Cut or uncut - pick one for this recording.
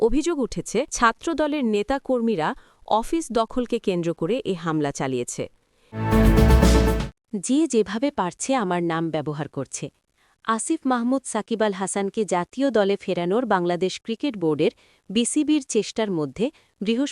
cut